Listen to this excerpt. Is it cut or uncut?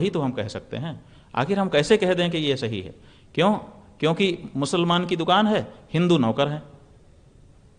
uncut